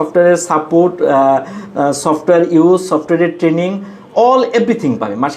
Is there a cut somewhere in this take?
no; 0 cuts

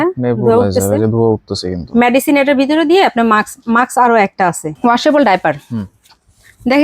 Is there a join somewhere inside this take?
yes; 1 cut; at 4.7 s

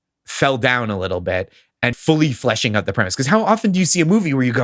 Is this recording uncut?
no; 1 cut; at 2.0 s

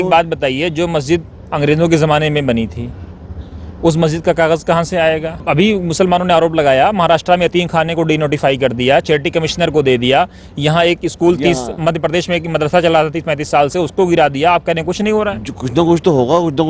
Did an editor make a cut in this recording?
yes; 1 cut; at 5.4 s

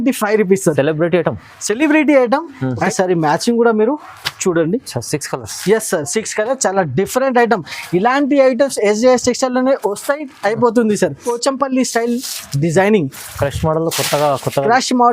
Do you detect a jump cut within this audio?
yes; 2 cuts; at 2.8 s, 11.3 s

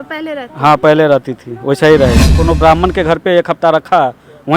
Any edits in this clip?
yes; 1 cut; at 2.3 s

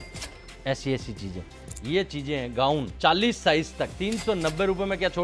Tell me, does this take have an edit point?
yes; 3 cuts; at 1.7 s, 2.9 s, 3.9 s

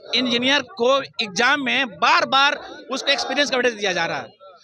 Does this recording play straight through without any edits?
yes; 0 cuts

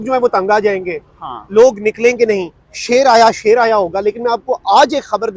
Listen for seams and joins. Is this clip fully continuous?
yes; 0 cuts

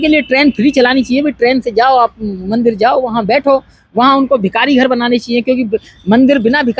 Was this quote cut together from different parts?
no; 0 cuts

